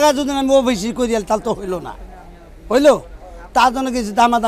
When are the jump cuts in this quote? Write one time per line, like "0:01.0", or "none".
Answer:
none